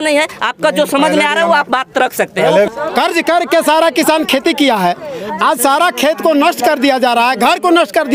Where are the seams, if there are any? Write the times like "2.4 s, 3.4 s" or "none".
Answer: 2.7 s